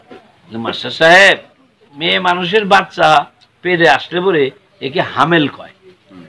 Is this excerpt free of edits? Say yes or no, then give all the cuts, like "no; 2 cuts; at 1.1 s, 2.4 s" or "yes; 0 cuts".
no; 1 cut; at 1.9 s